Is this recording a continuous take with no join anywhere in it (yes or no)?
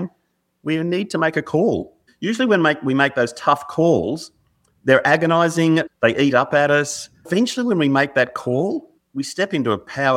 no